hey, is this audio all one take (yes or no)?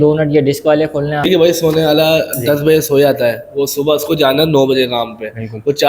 no